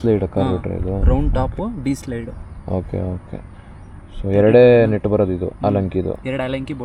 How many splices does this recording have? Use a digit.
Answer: 0